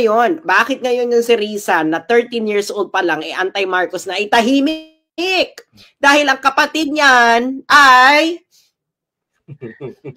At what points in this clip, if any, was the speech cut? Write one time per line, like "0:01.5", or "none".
none